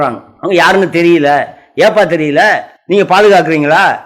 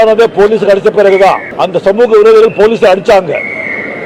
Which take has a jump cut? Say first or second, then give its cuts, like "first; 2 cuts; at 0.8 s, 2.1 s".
first; 1 cut; at 2.7 s